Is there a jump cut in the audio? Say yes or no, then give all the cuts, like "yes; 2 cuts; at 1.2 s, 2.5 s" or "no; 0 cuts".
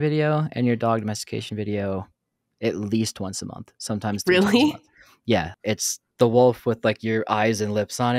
yes; 1 cut; at 5.5 s